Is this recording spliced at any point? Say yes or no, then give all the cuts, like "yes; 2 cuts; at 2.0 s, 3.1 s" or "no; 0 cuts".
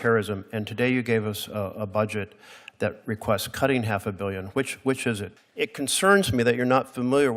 yes; 1 cut; at 5.3 s